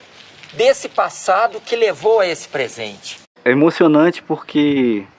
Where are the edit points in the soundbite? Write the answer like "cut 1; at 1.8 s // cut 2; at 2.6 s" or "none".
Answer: cut 1; at 3.2 s